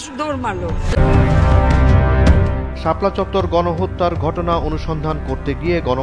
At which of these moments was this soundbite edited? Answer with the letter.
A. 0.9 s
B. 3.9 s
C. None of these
A